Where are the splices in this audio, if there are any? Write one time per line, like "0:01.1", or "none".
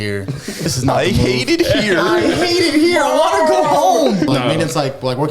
0:00.7
0:04.3